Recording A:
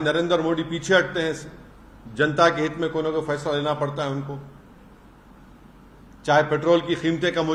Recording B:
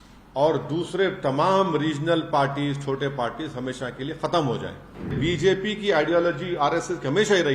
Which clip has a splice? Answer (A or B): B